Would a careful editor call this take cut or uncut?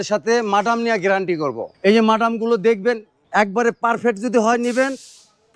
cut